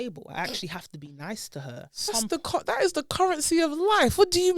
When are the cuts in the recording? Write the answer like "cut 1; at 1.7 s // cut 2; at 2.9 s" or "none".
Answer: cut 1; at 2.1 s